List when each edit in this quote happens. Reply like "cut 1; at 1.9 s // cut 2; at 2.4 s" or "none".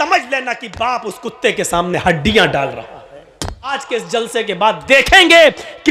cut 1; at 3.7 s